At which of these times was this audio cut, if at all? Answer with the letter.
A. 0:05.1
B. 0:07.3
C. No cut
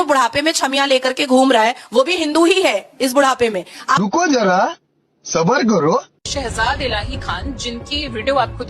C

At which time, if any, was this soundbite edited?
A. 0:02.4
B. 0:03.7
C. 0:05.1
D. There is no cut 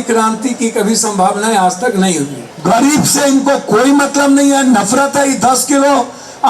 A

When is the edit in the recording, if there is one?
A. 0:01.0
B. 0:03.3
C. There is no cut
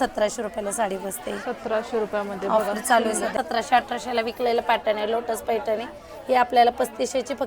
B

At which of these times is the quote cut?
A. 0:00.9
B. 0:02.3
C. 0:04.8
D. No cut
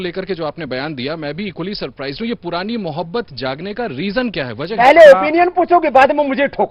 C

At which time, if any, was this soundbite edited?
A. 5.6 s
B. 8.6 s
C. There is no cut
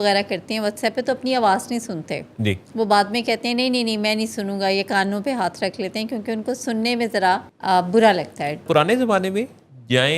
B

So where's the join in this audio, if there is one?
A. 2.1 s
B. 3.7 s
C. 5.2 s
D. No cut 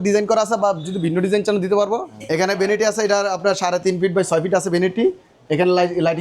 A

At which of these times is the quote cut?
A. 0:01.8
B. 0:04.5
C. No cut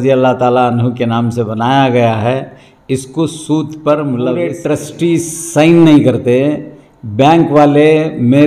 B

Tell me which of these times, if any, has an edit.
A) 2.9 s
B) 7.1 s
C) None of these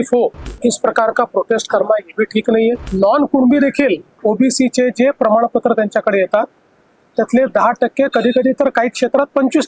A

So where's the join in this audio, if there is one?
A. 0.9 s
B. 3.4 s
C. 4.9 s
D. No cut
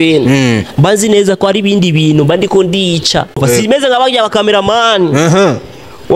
B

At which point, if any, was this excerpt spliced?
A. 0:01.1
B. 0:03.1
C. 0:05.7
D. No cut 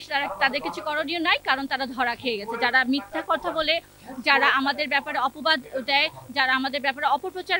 D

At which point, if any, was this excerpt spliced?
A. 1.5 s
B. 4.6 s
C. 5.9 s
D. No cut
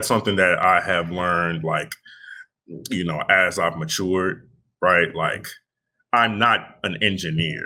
D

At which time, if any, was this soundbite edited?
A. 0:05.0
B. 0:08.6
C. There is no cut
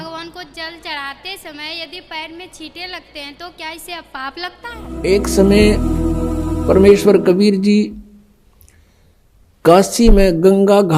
A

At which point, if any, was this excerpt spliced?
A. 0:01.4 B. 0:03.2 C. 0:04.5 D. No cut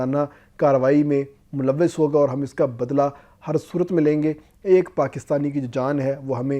D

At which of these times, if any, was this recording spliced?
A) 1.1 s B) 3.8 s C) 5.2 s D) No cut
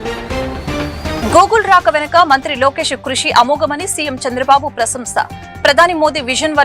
A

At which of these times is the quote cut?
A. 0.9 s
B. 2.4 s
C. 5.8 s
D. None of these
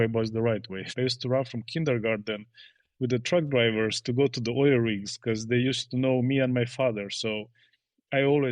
A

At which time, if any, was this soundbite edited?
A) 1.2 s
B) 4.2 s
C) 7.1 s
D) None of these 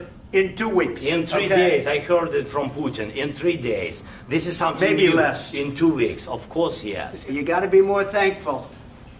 C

